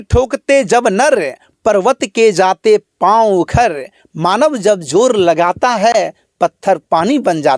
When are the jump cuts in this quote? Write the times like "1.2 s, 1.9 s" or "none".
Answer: none